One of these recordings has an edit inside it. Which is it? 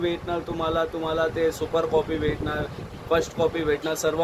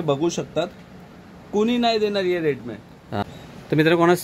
second; 1 cut; at 3.3 s

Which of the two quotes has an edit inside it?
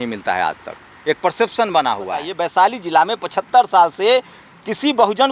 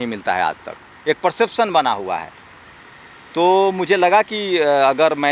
first; 1 cut; at 2.3 s

